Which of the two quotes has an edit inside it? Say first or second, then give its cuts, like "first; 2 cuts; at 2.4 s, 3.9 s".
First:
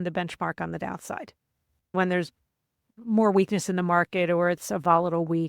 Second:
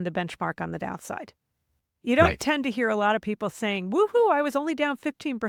first; 1 cut; at 2.0 s